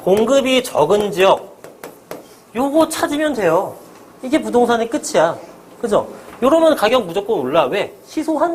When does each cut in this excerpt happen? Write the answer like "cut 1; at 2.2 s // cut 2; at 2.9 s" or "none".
none